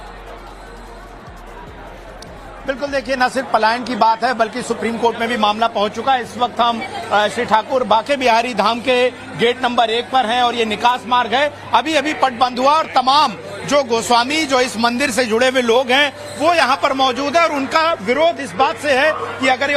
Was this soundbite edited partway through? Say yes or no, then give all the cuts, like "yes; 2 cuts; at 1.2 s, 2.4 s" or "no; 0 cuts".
no; 0 cuts